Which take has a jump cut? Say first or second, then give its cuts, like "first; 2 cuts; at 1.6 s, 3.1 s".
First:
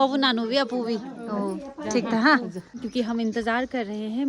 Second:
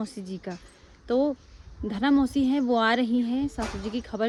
first; 1 cut; at 2.8 s